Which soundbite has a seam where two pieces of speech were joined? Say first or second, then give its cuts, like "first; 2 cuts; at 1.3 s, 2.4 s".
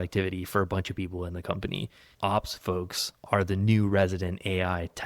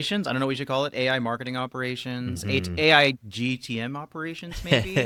first; 1 cut; at 2.1 s